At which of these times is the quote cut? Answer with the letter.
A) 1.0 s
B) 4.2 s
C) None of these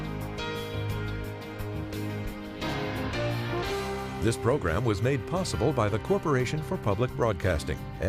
B